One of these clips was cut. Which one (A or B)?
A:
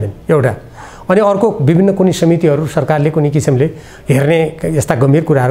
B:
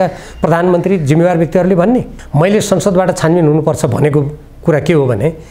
B